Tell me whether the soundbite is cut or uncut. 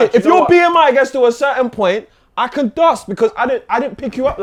uncut